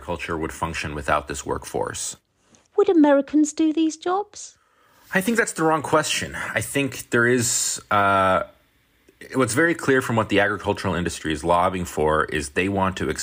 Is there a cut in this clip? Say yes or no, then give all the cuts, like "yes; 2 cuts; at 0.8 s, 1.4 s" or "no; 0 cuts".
no; 0 cuts